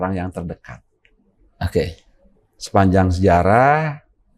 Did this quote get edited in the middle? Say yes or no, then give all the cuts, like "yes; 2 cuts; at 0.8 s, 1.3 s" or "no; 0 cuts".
no; 0 cuts